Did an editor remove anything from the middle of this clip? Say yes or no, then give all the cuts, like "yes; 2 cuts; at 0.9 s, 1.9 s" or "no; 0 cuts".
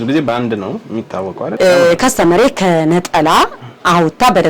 yes; 1 cut; at 1.4 s